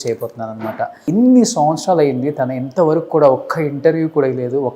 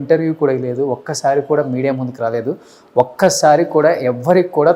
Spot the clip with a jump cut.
first; 1 cut; at 1.0 s

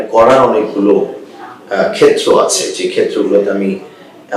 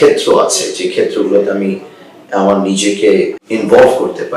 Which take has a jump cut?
second; 1 cut; at 3.4 s

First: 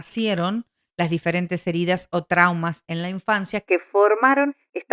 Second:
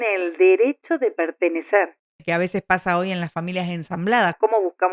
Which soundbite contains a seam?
second; 1 cut; at 2.2 s

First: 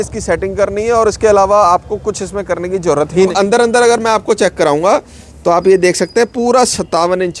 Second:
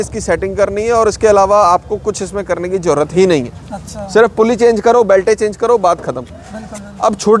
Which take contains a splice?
first; 1 cut; at 3.3 s

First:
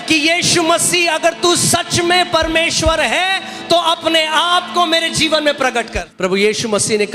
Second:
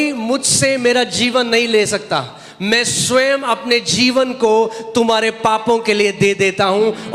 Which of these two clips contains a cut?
first; 1 cut; at 6.0 s

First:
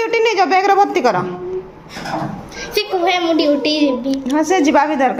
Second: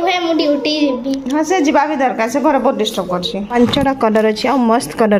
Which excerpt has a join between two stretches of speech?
second; 1 cut; at 3.5 s

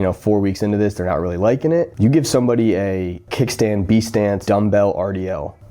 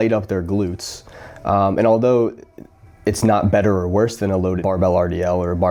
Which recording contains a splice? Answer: first; 3 cuts; at 1.9 s, 3.3 s, 4.4 s

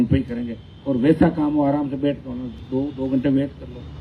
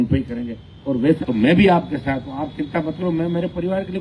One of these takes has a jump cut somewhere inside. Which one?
second; 1 cut; at 1.2 s

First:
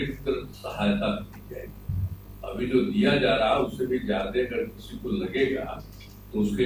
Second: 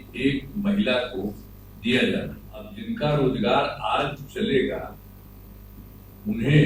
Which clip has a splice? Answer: second; 1 cut; at 2.7 s

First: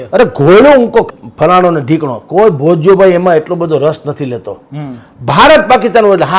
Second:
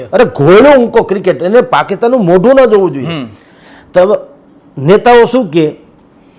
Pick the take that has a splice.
first; 1 cut; at 1.1 s

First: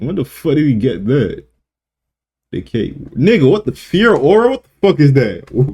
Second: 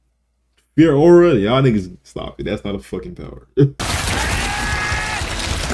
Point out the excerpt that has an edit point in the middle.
second; 1 cut; at 3.7 s

